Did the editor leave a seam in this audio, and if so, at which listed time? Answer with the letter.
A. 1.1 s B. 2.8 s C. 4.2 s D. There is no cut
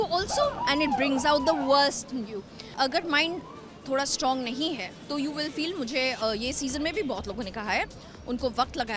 B